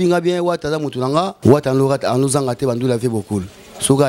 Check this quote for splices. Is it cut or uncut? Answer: cut